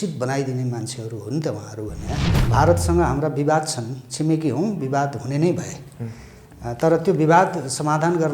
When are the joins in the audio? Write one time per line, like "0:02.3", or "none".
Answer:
0:02.3